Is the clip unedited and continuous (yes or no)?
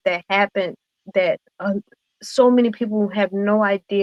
yes